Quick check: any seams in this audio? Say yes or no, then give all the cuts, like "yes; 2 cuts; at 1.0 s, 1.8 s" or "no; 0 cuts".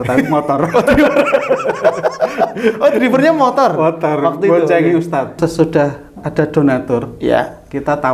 yes; 1 cut; at 5.4 s